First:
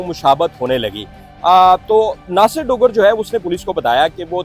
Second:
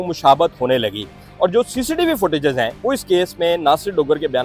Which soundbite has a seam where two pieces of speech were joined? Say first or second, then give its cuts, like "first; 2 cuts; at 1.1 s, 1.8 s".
second; 1 cut; at 1.2 s